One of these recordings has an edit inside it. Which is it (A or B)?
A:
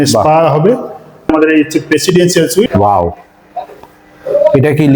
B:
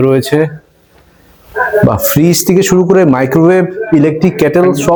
A